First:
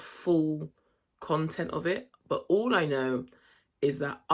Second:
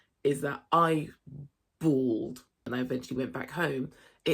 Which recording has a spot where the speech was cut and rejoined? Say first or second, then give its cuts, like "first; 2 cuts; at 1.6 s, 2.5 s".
second; 1 cut; at 2.7 s